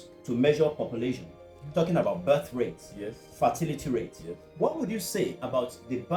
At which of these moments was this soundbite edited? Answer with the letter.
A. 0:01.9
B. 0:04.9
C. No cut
C